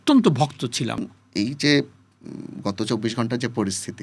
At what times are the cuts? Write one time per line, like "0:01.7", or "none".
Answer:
0:01.0